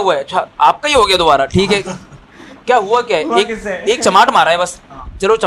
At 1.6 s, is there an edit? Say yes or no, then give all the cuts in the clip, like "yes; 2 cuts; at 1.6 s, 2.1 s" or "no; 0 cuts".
no; 0 cuts